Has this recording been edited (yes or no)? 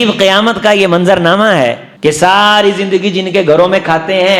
yes